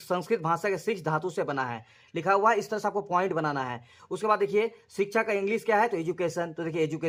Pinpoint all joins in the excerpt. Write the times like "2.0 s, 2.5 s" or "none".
none

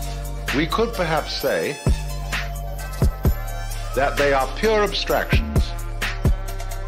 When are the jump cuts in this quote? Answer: 1.8 s

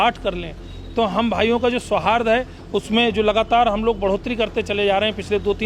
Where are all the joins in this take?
none

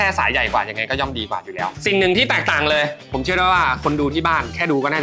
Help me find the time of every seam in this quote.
1.8 s

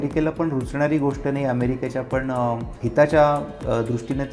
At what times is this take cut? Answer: 2.8 s

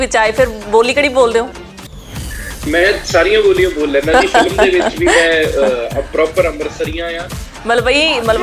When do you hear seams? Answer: 7.3 s

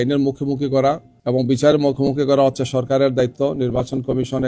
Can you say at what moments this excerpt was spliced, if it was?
1.1 s

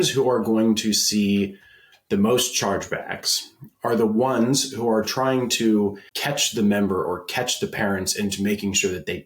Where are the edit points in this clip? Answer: 6.1 s

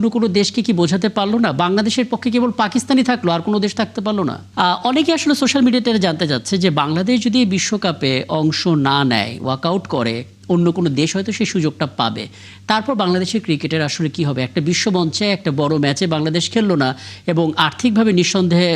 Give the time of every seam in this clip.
4.4 s

